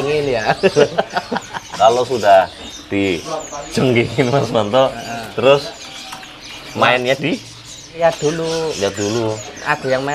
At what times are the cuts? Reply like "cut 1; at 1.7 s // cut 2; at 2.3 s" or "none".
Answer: cut 1; at 1.7 s // cut 2; at 8.0 s